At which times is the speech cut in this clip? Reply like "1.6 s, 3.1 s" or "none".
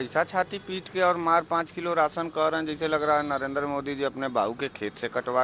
none